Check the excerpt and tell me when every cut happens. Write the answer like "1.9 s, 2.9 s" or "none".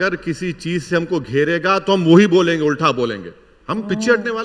none